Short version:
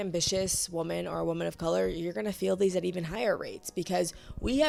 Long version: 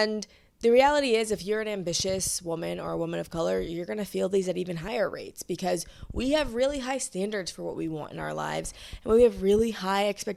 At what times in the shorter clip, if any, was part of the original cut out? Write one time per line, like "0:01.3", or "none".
none